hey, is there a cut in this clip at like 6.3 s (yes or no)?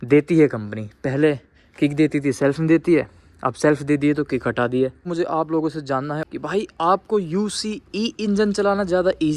yes